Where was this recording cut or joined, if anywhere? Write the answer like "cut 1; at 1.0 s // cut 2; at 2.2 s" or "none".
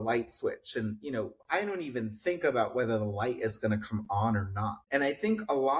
cut 1; at 4.8 s